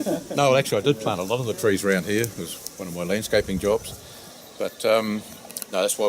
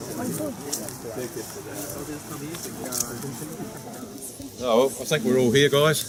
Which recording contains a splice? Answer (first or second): first